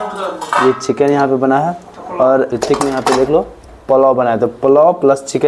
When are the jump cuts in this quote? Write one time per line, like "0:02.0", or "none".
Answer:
0:02.5